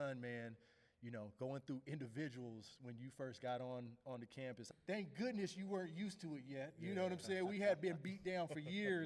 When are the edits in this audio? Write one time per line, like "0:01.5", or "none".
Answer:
0:04.6